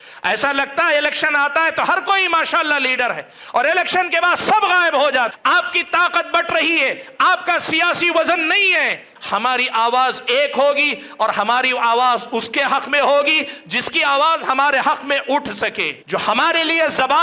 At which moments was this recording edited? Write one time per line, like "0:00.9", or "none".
0:05.4
0:09.1
0:15.9